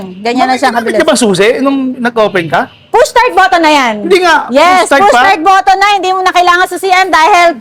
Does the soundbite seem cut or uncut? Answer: uncut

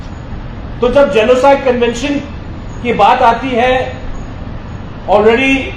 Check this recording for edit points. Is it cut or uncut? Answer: uncut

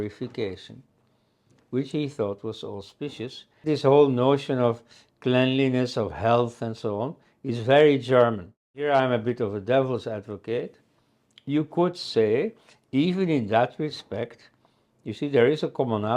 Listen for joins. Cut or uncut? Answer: cut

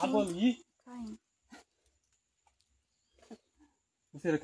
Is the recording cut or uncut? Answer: uncut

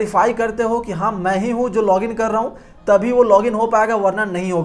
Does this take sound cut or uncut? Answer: uncut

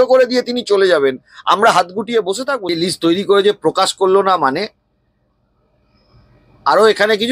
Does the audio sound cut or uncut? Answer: cut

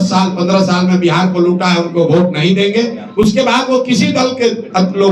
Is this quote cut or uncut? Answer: uncut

